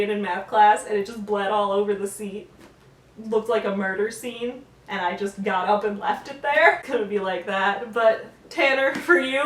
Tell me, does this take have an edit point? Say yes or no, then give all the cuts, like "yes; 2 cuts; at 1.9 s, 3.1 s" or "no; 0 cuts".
yes; 1 cut; at 6.8 s